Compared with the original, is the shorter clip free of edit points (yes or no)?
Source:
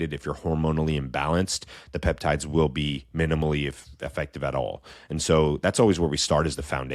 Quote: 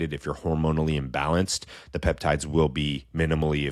yes